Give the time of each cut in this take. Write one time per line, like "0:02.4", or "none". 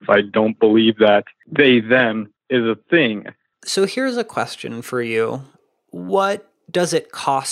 0:01.4
0:02.3
0:03.6